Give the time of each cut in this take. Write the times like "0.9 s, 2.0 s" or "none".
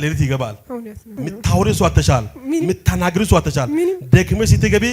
1.2 s

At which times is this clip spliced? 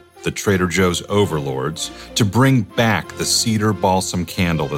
none

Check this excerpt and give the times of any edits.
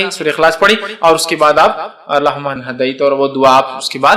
2.6 s

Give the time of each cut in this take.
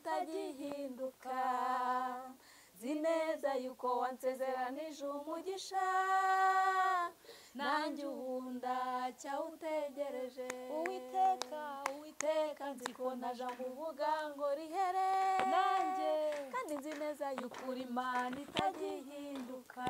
none

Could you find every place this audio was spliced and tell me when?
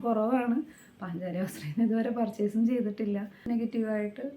3.4 s

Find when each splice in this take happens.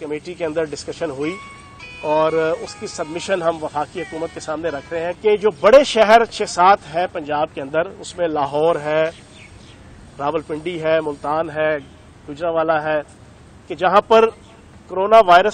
5.2 s

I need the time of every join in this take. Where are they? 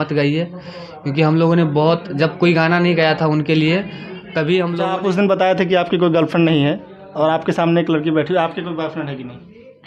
4.7 s

